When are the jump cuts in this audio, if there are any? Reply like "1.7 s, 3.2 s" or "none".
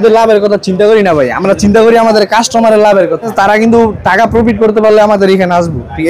3.3 s